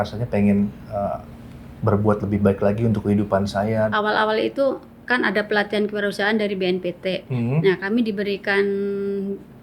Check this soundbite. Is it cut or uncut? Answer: cut